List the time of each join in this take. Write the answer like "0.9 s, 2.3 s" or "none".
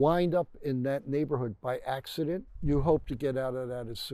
2.5 s